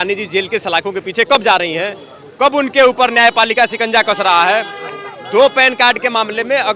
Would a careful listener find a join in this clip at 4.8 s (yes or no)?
no